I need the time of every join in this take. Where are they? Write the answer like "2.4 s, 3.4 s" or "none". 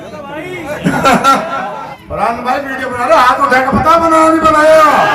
1.9 s